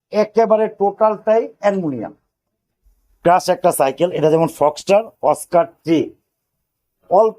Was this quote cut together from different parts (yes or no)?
yes